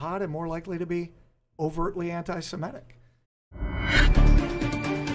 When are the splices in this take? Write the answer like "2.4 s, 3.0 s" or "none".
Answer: 3.2 s